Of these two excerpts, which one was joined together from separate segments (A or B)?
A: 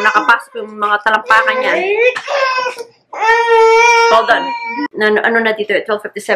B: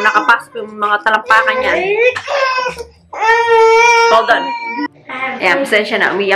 A